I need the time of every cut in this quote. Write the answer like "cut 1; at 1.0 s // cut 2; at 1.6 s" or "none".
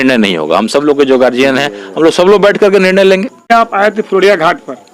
cut 1; at 3.5 s